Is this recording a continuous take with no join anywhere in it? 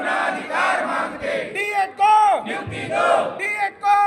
yes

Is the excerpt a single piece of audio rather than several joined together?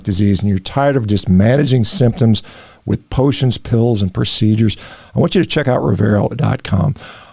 yes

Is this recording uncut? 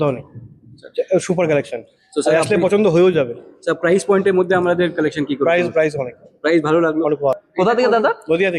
no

